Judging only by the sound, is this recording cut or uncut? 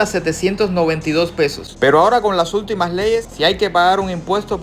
cut